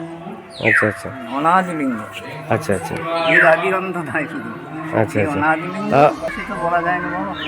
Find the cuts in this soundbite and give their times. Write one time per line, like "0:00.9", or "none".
0:06.2